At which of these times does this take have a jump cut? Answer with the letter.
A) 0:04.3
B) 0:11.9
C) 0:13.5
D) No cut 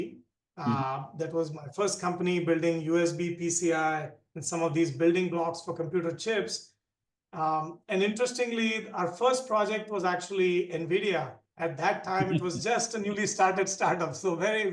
D